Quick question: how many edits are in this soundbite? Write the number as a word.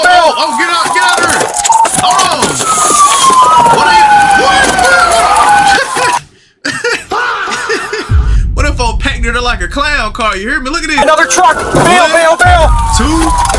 one